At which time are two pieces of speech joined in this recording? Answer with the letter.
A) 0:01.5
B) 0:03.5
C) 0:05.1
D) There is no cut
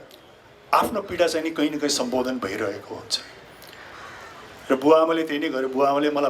D